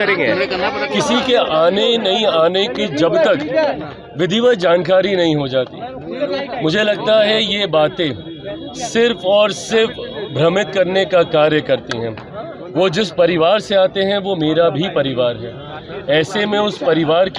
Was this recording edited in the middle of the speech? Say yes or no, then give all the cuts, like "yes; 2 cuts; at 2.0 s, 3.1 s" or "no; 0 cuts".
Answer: no; 0 cuts